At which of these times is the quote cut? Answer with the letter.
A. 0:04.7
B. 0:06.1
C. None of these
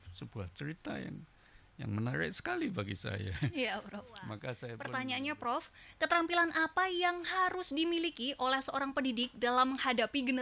A